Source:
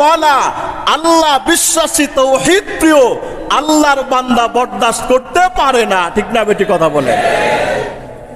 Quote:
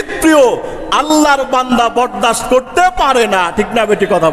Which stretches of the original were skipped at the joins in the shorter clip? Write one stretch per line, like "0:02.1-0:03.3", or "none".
none